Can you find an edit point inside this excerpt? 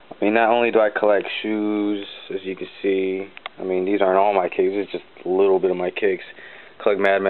yes; 1 cut; at 2.8 s

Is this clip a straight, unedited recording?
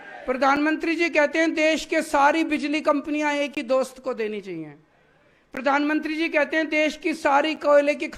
yes; 0 cuts

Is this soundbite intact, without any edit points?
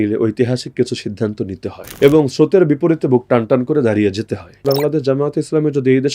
no; 2 cuts; at 1.8 s, 4.6 s

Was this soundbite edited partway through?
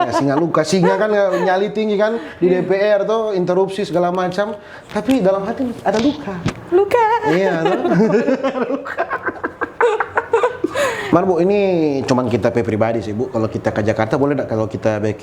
no; 0 cuts

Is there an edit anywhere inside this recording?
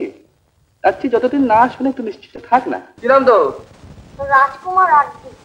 yes; 1 cut; at 2.8 s

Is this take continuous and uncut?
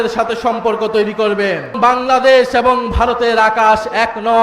no; 1 cut; at 1.7 s

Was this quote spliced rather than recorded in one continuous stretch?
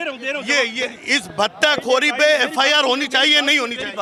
no; 0 cuts

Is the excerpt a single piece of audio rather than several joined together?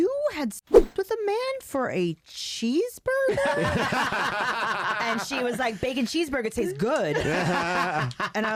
yes; 0 cuts

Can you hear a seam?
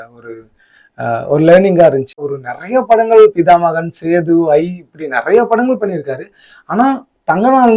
yes; 1 cut; at 2.2 s

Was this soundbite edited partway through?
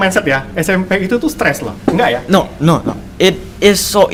no; 0 cuts

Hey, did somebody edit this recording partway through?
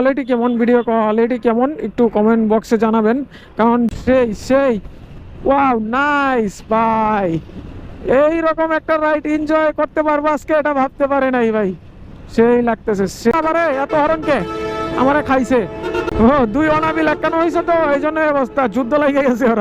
yes; 2 cuts; at 3.9 s, 13.3 s

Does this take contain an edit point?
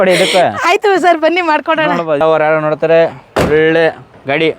yes; 1 cut; at 2.2 s

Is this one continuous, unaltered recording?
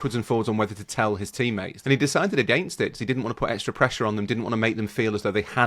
no; 1 cut; at 1.7 s

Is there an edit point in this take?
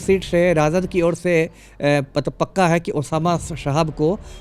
no; 0 cuts

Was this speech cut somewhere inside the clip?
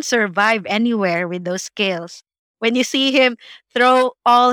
no; 0 cuts

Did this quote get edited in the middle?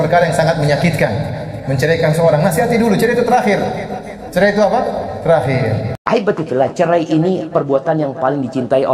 yes; 1 cut; at 5.9 s

